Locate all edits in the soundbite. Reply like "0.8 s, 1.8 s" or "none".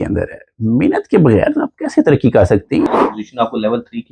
2.9 s